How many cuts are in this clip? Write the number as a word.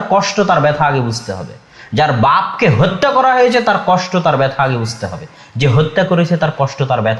zero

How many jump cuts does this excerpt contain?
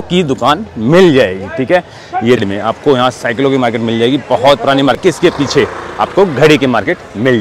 two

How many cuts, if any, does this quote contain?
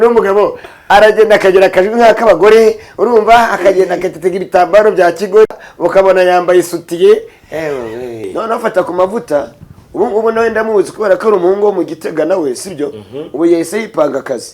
one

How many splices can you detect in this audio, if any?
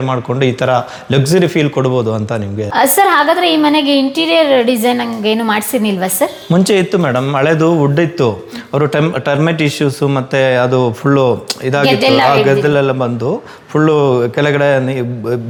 zero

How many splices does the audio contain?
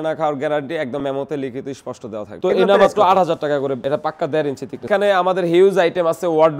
two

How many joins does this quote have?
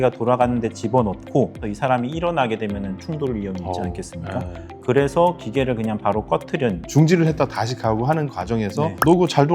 two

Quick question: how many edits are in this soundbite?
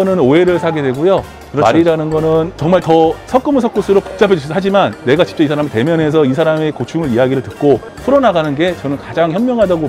zero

